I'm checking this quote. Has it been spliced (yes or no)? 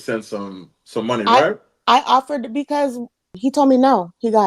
yes